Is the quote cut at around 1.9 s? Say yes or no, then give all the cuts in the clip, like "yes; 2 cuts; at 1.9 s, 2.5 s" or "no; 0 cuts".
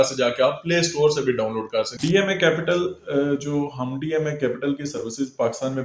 yes; 1 cut; at 1.9 s